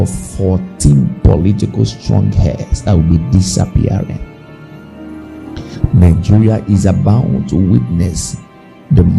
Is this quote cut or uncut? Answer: uncut